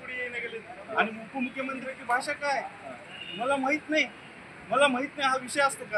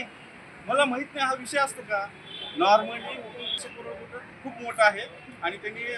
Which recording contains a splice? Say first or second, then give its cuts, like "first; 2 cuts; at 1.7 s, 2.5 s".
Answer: second; 1 cut; at 3.7 s